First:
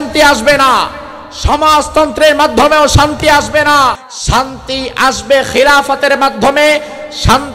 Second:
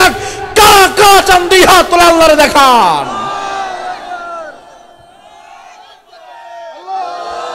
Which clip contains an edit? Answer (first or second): first